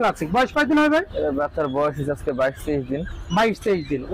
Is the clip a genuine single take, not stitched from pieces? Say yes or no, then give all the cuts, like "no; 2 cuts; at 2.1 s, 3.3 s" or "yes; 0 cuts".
yes; 0 cuts